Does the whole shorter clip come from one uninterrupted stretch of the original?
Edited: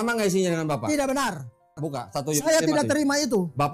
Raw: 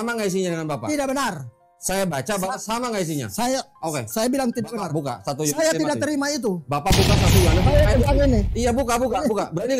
no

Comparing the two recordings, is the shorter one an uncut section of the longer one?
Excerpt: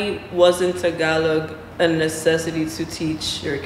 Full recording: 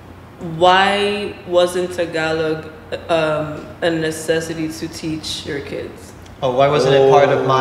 no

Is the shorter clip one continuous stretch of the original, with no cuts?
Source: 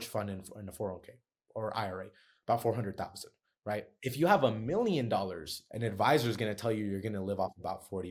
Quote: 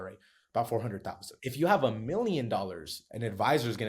no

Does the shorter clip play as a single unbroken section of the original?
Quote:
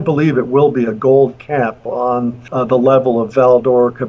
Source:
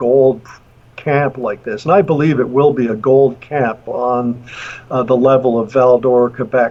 no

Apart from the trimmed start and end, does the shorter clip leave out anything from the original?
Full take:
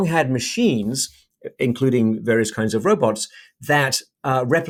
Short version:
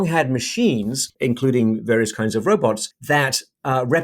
yes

